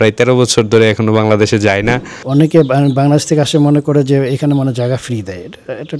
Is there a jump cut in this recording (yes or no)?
yes